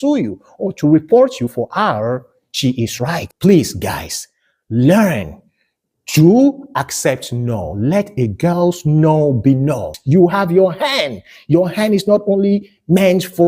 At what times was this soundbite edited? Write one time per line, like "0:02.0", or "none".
0:03.3
0:10.0